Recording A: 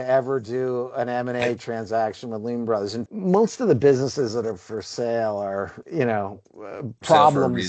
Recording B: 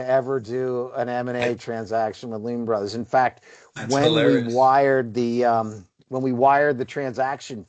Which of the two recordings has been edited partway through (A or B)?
A